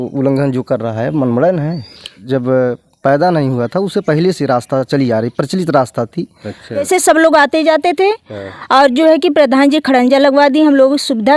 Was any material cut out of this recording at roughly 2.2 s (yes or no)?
yes